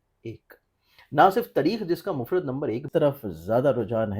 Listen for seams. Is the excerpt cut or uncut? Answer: cut